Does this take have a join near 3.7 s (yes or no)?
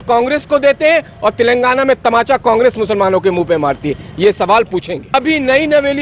no